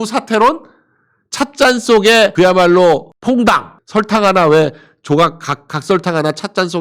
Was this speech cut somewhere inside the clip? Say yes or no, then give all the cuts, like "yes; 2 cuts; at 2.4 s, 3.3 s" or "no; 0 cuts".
yes; 1 cut; at 3.8 s